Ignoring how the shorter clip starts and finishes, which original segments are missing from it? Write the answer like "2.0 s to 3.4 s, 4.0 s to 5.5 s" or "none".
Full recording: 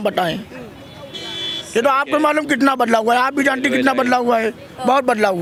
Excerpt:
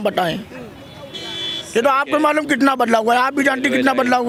none

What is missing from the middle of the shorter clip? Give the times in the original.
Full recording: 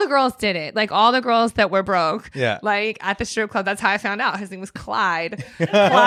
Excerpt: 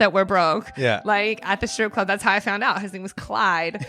none

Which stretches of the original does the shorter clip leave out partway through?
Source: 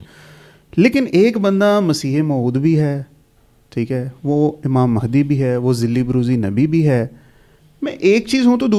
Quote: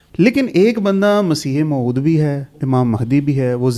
3.2 s to 4.6 s

